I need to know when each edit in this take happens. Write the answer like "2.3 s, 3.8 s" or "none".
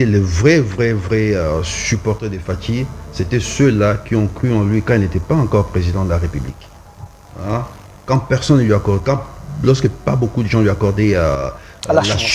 none